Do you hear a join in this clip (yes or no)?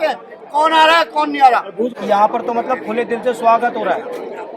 yes